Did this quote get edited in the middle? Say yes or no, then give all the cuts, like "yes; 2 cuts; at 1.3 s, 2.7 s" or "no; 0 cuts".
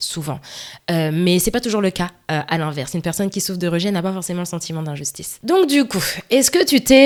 no; 0 cuts